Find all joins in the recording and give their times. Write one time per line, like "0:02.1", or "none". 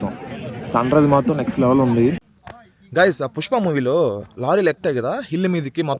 0:02.2

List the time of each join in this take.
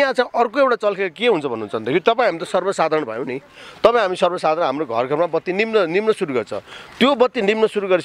none

